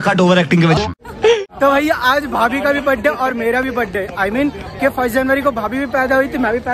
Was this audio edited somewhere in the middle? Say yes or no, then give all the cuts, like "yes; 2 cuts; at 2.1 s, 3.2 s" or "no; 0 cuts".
yes; 1 cut; at 1.4 s